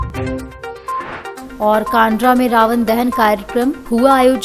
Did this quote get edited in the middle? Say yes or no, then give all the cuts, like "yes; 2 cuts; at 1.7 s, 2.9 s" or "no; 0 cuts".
yes; 1 cut; at 1.3 s